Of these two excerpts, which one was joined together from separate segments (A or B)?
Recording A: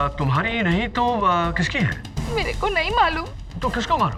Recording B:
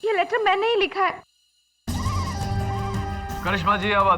B